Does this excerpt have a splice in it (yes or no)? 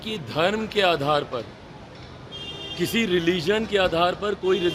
no